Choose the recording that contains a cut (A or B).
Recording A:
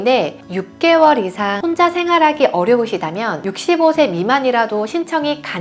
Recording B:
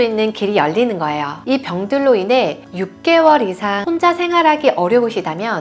B